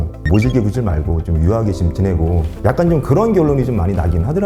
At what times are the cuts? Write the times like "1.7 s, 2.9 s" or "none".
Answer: none